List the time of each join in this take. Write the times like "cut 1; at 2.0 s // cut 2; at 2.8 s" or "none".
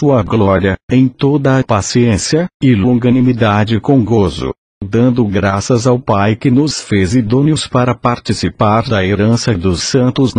cut 1; at 5.5 s